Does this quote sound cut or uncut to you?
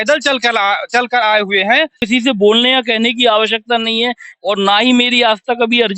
cut